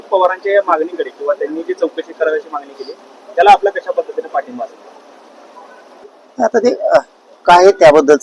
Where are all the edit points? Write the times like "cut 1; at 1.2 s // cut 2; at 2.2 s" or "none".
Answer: none